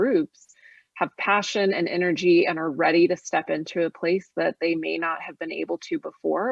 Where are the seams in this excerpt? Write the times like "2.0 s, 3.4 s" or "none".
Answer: none